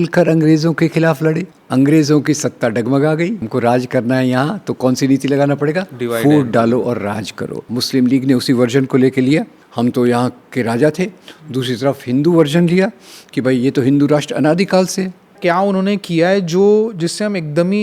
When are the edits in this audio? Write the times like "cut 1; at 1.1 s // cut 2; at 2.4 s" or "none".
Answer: cut 1; at 1.5 s // cut 2; at 3.4 s // cut 3; at 7.7 s // cut 4; at 9.6 s // cut 5; at 15.3 s